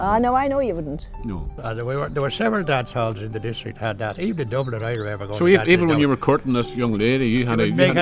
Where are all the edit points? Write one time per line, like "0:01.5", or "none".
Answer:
0:01.6